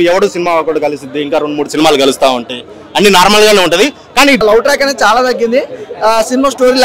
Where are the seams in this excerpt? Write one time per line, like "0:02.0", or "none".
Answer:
0:04.4